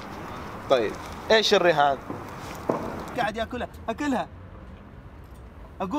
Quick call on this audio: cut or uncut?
cut